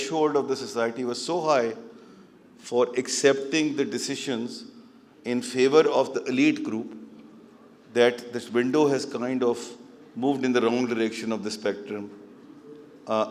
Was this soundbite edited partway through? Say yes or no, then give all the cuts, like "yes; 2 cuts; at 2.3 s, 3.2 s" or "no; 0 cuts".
no; 0 cuts